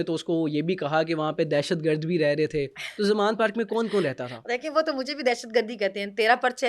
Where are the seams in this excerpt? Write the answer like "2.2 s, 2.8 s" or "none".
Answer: none